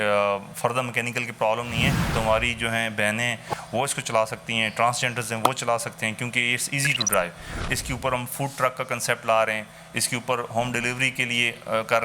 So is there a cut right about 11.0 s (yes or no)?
no